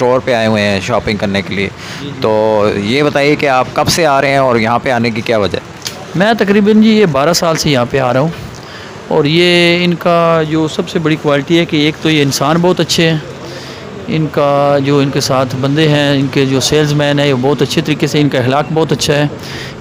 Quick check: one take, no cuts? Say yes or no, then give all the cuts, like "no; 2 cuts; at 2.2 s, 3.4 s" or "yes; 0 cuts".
yes; 0 cuts